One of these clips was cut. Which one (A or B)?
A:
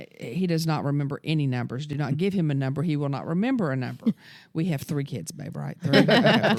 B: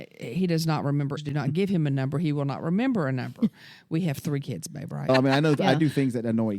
B